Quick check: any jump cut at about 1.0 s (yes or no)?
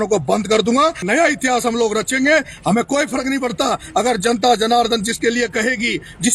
yes